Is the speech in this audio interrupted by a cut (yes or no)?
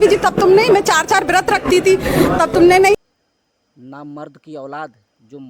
yes